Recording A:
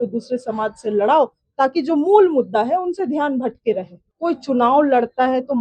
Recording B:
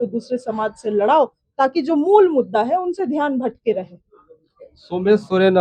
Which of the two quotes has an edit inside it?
A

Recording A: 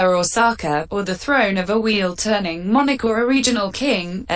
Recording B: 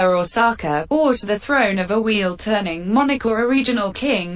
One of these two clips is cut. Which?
A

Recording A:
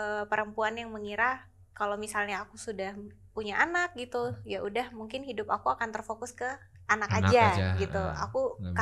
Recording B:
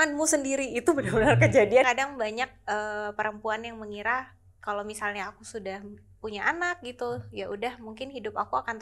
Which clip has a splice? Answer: B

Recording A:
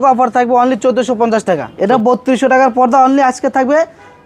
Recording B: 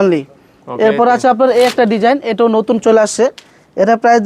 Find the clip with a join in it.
A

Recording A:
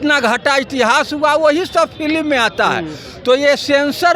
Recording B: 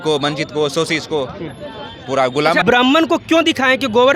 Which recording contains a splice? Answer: B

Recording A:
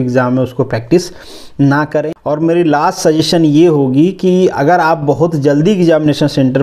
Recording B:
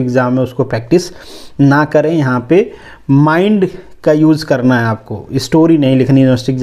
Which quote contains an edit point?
A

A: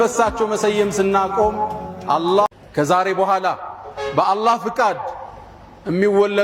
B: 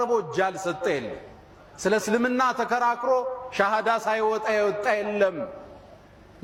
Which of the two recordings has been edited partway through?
A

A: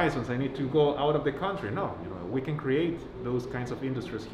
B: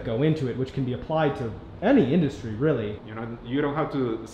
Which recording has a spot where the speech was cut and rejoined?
B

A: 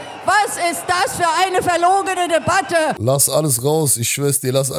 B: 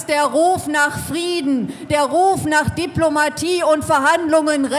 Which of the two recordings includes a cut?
A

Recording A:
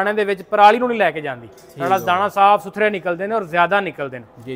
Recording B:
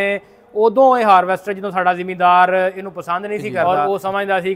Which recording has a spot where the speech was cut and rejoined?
B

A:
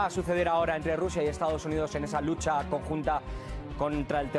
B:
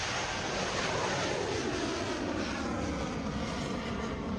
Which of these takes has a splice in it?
B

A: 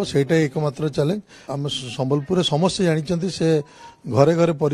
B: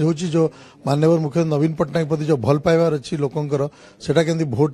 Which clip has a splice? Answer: A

